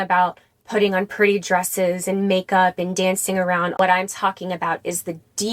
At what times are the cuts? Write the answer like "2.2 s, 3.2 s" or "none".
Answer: 3.8 s

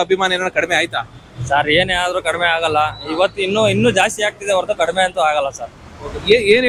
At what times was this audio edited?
none

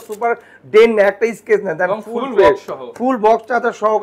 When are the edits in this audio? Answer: none

